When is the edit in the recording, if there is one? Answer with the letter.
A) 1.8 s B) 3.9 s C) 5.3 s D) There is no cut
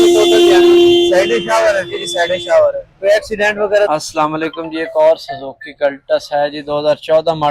B